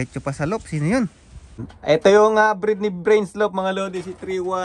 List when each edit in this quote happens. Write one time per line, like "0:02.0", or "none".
0:01.7